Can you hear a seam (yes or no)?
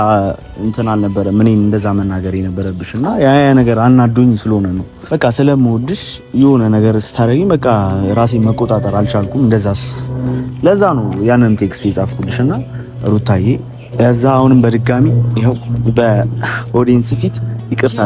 yes